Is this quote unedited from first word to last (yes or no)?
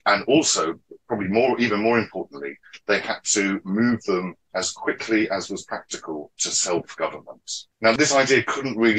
no